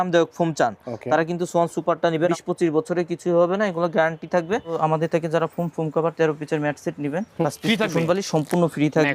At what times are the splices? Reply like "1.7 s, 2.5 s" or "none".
2.3 s, 4.7 s, 7.4 s